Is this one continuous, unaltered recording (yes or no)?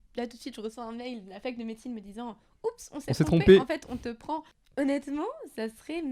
no